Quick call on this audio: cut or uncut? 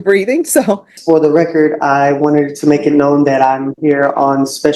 cut